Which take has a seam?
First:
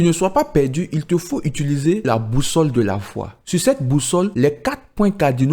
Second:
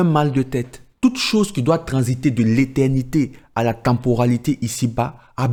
first; 2 cuts; at 2.1 s, 4.3 s

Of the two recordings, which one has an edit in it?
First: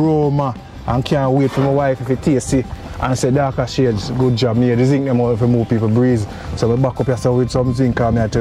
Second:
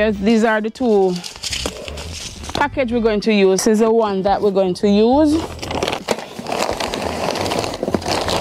second; 2 cuts; at 3.6 s, 6.0 s

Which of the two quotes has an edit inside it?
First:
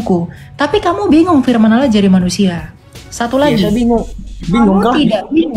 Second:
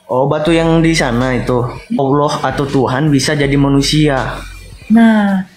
second; 1 cut; at 2.0 s

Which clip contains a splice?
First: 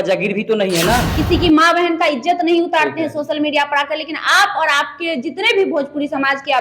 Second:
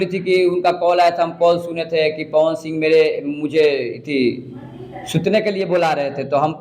first; 1 cut; at 1.1 s

